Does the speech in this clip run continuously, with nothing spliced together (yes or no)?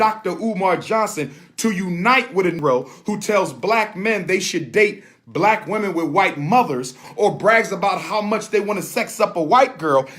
no